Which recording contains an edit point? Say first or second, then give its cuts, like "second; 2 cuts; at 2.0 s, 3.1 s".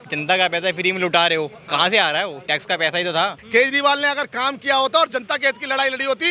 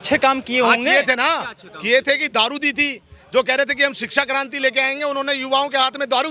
first; 1 cut; at 3.4 s